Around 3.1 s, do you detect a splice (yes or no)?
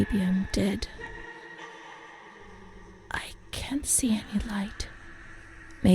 yes